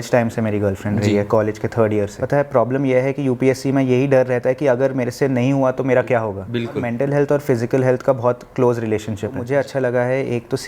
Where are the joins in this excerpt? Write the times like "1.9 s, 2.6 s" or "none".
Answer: 2.2 s, 6.9 s, 9.4 s